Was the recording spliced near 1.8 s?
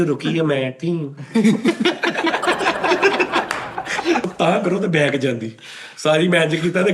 no; 1 cut; at 4.2 s

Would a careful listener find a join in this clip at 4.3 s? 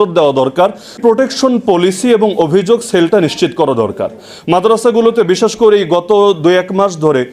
no; 1 cut; at 0.9 s

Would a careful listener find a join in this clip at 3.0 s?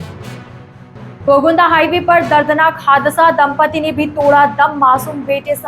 no; 1 cut; at 1.1 s

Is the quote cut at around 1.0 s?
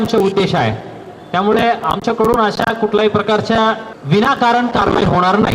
no; 1 cut; at 3.9 s

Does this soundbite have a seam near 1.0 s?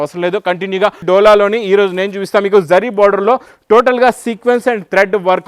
yes; 1 cut; at 1.0 s

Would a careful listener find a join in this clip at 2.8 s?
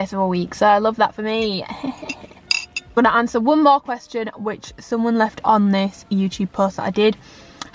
no; 0 cuts

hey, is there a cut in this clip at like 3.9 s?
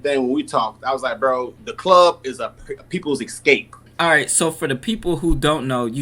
yes; 1 cut; at 3.9 s

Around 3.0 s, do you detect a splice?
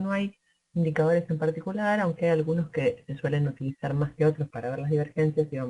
yes; 1 cut; at 3.0 s

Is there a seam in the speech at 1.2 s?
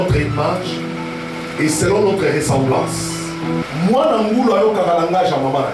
no; 1 cut; at 3.6 s

